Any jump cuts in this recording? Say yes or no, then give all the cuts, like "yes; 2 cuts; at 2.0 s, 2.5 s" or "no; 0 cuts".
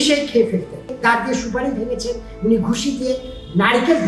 yes; 1 cut; at 0.9 s